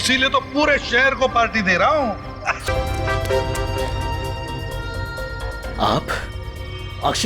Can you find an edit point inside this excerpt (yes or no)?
yes